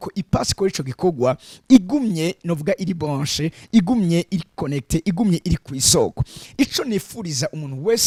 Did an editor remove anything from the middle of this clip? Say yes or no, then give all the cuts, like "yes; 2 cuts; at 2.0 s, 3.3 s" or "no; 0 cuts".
no; 0 cuts